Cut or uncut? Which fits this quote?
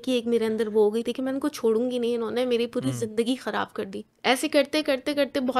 cut